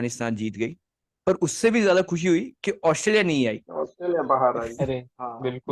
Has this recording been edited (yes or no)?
no